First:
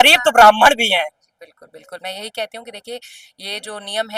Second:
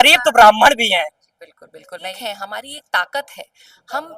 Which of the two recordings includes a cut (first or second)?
second